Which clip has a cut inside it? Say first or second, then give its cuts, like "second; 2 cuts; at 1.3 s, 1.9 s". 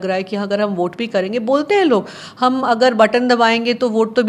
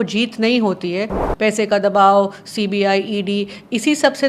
second; 1 cut; at 1.2 s